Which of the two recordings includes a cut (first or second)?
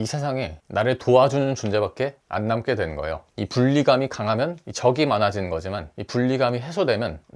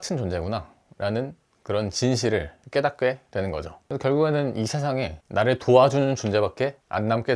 first